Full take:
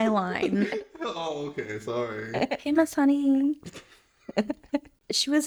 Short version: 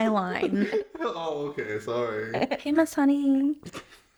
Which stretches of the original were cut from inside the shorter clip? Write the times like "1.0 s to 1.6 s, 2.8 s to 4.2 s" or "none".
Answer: none